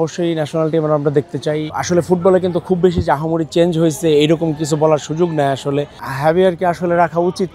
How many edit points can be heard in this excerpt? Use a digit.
2